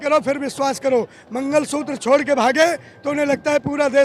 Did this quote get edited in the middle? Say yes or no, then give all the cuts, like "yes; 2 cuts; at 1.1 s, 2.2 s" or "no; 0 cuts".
no; 0 cuts